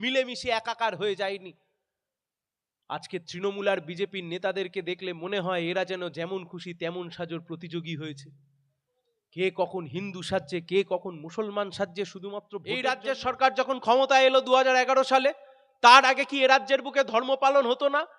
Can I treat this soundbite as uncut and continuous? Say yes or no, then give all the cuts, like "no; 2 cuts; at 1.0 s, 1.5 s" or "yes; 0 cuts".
no; 1 cut; at 12.6 s